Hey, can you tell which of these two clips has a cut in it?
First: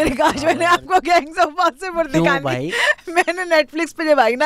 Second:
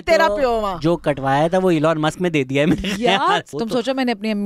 second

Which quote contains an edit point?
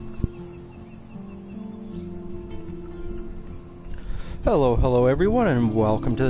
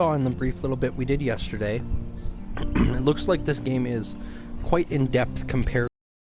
first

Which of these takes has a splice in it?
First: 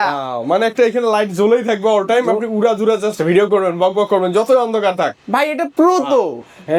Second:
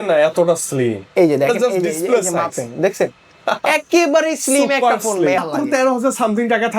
second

